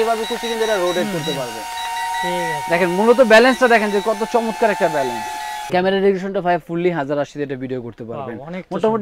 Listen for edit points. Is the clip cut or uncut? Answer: cut